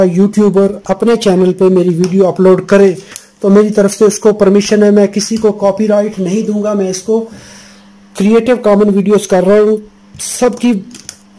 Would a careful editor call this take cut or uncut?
uncut